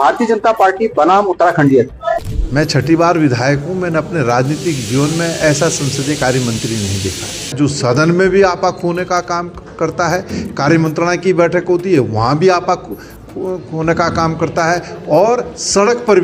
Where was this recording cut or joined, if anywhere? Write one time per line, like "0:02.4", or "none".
0:02.0
0:07.6